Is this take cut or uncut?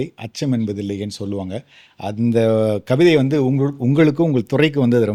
uncut